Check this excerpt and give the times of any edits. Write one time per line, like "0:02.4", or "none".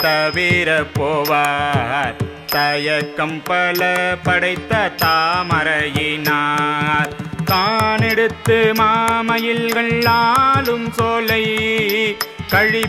0:02.3